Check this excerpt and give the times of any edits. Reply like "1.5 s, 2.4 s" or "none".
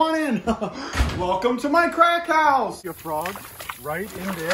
2.8 s